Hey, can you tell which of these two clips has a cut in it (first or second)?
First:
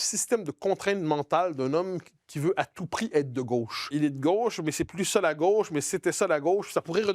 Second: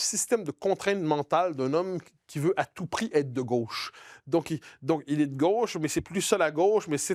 first